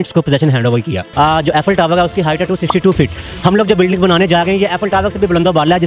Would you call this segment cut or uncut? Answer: cut